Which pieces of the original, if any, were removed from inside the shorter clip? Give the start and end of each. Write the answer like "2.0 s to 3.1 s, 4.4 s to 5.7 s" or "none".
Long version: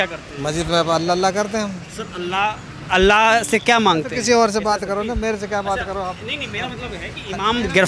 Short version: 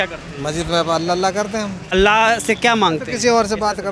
1.9 s to 2.9 s